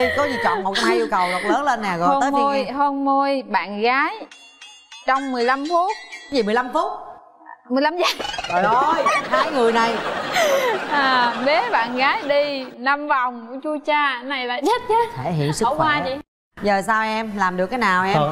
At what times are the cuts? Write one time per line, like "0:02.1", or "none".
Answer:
none